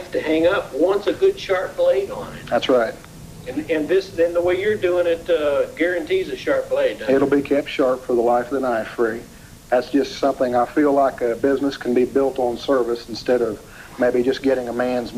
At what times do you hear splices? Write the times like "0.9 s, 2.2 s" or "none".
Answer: none